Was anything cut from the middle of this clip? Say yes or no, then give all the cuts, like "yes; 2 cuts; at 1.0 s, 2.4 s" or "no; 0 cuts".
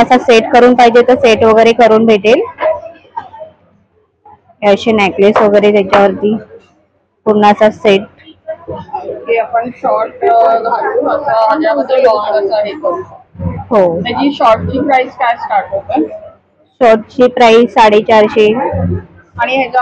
no; 0 cuts